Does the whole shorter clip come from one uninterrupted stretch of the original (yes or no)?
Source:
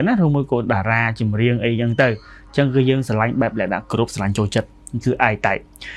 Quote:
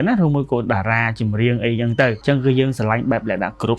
no